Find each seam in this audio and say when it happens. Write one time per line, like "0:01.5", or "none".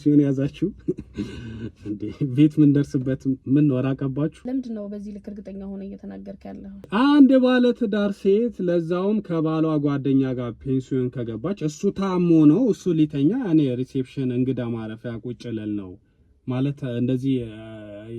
0:04.4
0:06.9